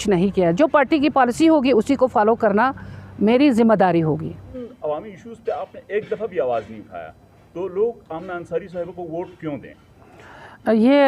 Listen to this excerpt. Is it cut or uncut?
cut